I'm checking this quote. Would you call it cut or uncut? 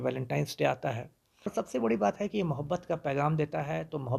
cut